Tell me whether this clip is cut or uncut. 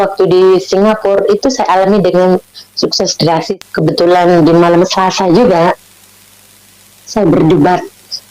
cut